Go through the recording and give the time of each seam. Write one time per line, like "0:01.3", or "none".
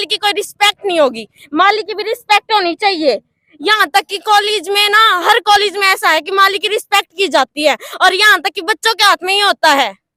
none